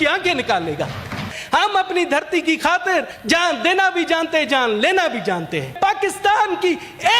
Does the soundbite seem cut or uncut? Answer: cut